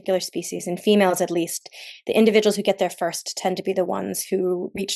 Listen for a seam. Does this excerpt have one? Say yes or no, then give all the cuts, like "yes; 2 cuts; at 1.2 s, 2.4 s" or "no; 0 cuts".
no; 0 cuts